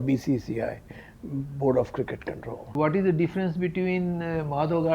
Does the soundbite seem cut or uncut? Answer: cut